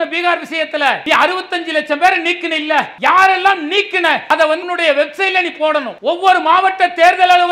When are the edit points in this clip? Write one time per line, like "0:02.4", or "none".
0:01.0
0:02.9
0:04.4
0:05.9